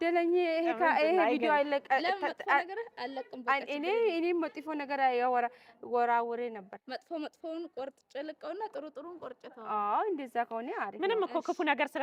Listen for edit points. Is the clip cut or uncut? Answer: uncut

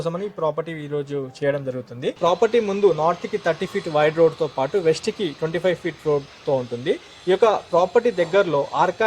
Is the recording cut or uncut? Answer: cut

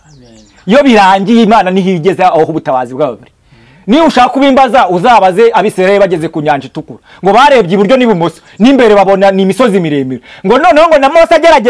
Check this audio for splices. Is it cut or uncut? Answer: uncut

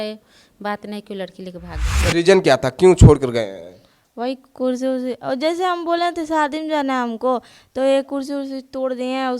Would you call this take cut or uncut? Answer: cut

